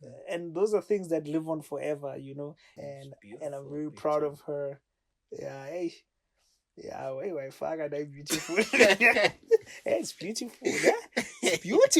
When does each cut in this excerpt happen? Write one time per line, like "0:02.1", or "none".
0:02.6